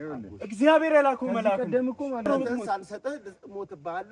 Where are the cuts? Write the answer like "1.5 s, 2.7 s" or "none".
2.2 s